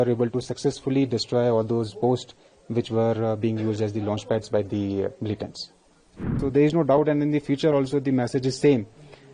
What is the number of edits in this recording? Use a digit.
1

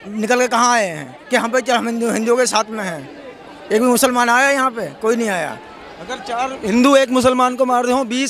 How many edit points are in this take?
0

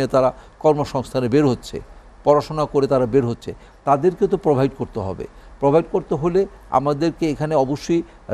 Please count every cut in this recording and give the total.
0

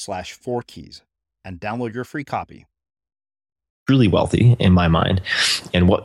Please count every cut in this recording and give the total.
1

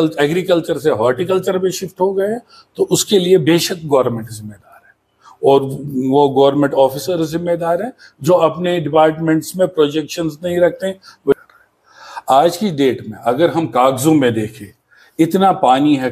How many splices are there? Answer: 1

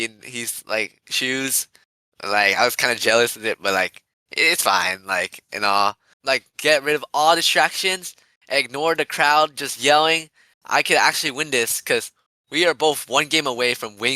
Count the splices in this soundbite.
1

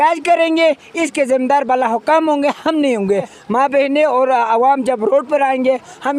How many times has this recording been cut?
1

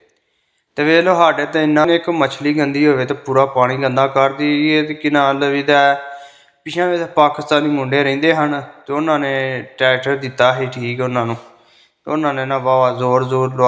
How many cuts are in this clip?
1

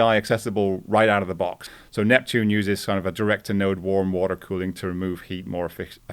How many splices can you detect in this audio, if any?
1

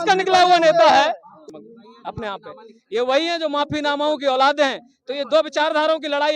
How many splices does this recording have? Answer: 1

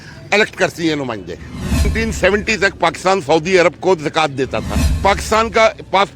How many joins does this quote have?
2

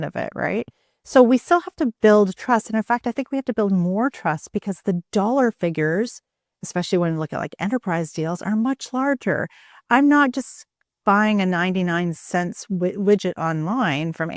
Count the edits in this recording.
0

